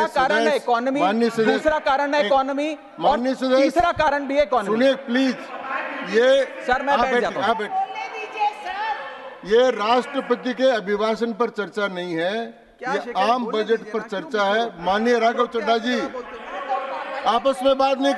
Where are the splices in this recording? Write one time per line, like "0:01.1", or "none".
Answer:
none